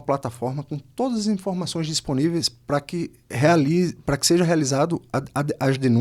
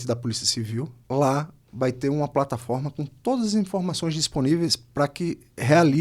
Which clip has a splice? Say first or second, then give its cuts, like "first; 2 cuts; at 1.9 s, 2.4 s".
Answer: second; 1 cut; at 1.0 s